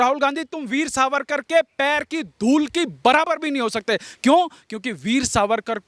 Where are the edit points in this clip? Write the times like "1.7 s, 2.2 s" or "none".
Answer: none